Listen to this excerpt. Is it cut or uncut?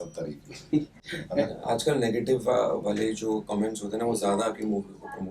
uncut